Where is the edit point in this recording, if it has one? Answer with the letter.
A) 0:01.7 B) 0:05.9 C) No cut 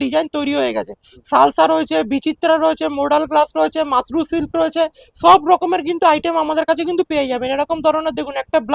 C